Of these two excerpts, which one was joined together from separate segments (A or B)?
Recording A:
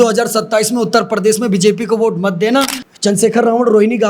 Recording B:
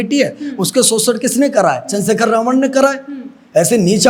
A